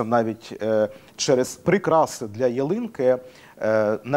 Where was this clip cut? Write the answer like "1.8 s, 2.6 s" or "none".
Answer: 1.6 s